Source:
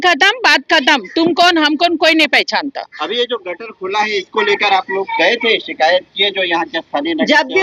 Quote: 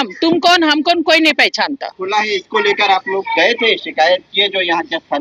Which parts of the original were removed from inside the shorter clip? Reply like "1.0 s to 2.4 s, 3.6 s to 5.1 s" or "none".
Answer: 2.8 s to 3.7 s